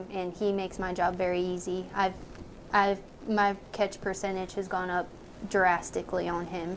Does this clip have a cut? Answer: no; 0 cuts

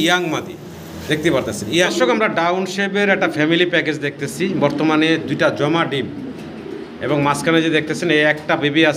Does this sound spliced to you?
yes; 1 cut; at 1.9 s

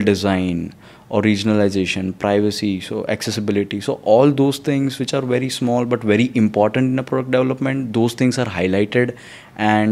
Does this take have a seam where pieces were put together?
no; 0 cuts

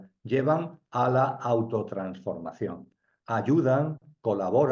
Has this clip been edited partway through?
no; 0 cuts

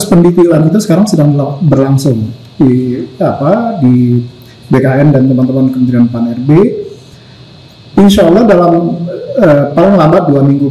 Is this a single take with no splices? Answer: yes; 0 cuts

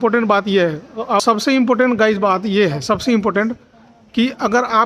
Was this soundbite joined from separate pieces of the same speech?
yes; 1 cut; at 1.2 s

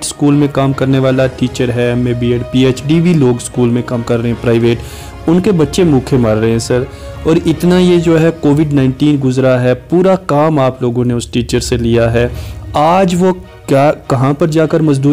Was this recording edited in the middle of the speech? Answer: no; 0 cuts

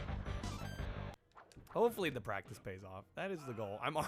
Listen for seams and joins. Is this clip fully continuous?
no; 1 cut; at 1.1 s

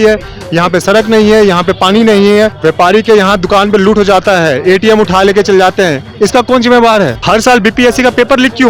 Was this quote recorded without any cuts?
no; 2 cuts; at 2.6 s, 7.2 s

